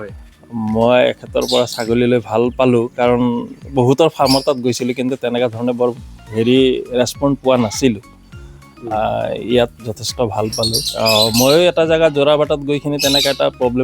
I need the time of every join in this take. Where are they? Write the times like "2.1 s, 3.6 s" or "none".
10.8 s